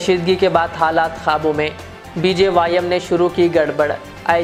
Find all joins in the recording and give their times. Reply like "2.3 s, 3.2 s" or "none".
none